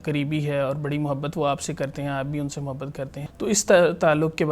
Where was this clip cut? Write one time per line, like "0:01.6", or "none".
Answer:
0:03.2